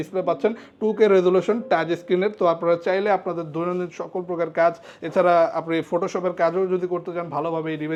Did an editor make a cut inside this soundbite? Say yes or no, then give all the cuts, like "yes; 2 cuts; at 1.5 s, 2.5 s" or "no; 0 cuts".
no; 0 cuts